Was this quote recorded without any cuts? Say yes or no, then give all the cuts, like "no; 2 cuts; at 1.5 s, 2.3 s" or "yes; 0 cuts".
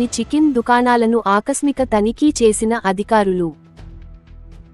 yes; 0 cuts